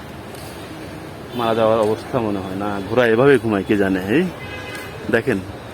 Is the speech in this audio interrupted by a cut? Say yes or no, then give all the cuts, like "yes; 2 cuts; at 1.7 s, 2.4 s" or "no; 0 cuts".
no; 0 cuts